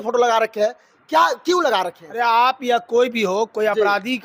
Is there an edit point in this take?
no; 0 cuts

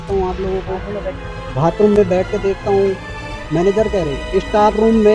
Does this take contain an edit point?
no; 0 cuts

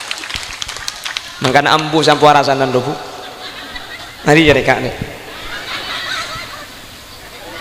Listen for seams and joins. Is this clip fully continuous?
yes; 0 cuts

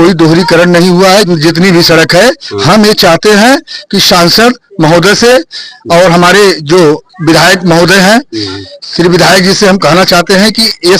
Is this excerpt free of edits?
no; 1 cut; at 1.3 s

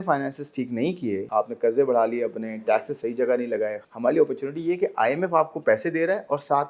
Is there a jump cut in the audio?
yes; 2 cuts; at 1.3 s, 3.8 s

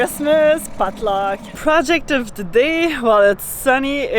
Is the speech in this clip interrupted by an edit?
yes; 1 cut; at 1.5 s

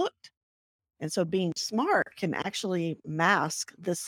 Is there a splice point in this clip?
no; 0 cuts

